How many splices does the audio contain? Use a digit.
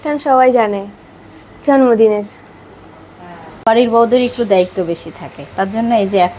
1